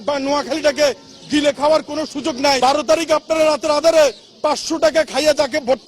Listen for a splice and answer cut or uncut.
cut